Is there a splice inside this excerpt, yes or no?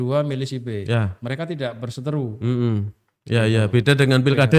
no